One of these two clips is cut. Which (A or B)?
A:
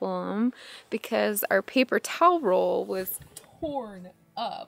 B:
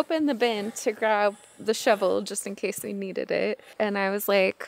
B